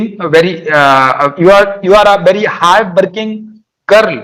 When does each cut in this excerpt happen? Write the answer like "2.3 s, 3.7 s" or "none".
none